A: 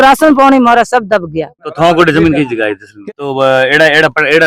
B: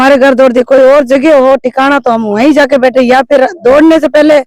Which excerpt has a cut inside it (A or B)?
A